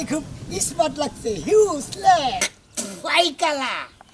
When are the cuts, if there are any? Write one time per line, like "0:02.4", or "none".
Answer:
0:02.4

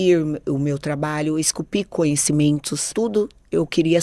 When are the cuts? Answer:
0:02.9

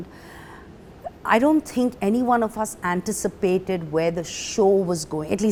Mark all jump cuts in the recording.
none

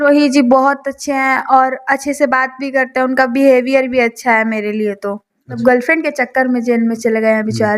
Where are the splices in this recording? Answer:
0:05.6

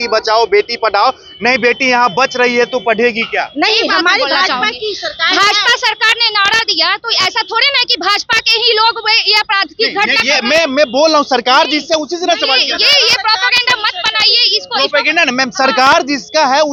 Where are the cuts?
none

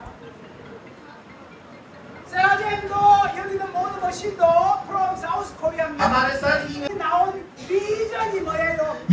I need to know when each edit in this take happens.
0:06.9

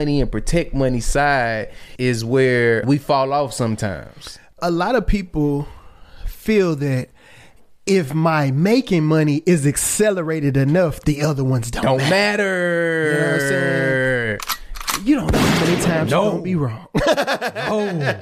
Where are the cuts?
0:01.9
0:02.8
0:04.6

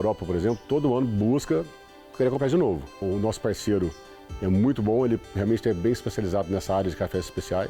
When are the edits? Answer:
none

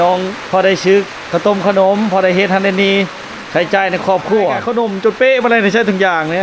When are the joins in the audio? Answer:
0:04.6

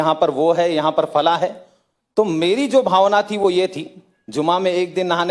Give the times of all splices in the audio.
none

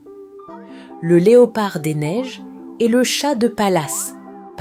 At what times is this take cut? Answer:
none

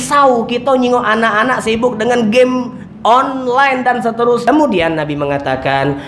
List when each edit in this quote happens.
0:04.4

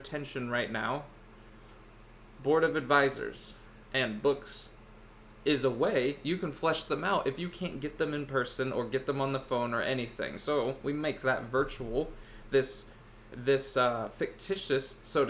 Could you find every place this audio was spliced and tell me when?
none

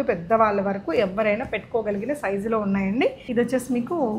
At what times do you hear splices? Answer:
0:03.2

